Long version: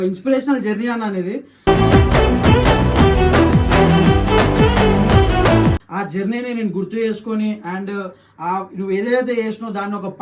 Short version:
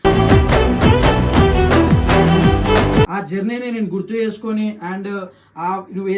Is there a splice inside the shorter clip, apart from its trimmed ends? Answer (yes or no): yes